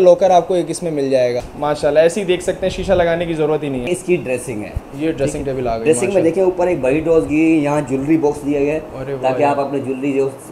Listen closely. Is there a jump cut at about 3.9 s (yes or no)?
yes